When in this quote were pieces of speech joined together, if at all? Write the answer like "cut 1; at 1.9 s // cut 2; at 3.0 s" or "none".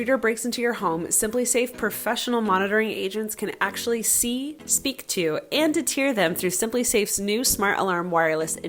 none